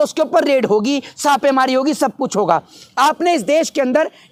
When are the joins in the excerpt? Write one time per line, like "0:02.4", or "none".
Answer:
none